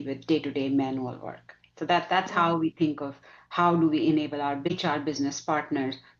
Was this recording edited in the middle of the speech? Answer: yes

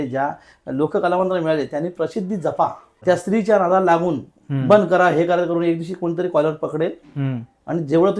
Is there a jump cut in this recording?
yes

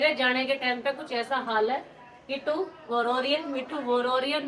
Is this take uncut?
yes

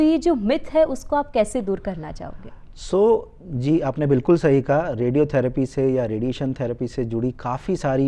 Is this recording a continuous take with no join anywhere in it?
yes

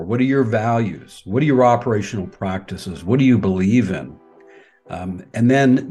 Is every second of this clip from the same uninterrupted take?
yes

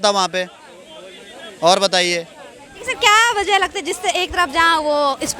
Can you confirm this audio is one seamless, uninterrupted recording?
yes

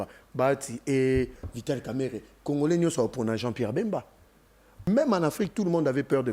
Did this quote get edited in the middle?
yes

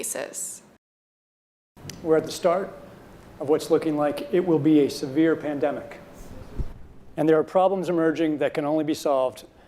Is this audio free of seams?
no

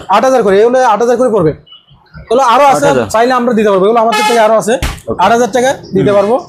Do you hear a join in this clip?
no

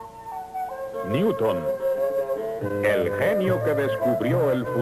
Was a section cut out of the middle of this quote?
yes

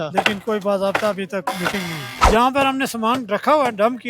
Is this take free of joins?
no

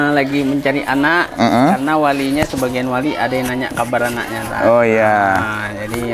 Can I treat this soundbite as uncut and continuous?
yes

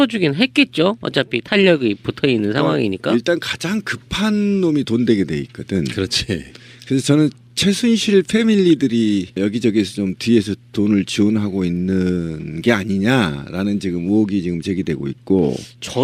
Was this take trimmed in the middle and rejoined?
yes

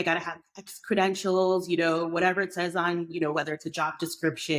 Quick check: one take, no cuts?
yes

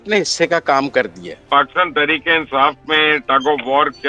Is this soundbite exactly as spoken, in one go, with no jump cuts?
no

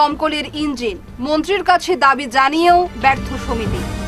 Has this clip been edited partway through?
no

